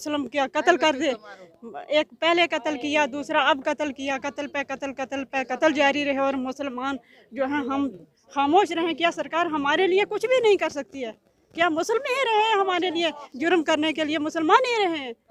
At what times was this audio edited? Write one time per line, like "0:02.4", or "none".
none